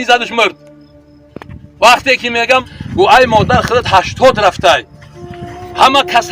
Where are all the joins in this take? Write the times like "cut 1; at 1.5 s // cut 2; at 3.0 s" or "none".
cut 1; at 2.6 s